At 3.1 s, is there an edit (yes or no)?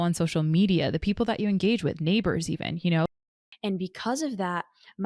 yes